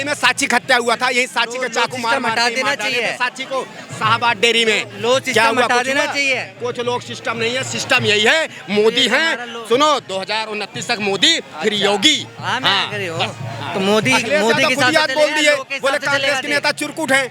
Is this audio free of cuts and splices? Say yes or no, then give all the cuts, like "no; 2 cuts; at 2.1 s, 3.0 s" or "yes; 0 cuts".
yes; 0 cuts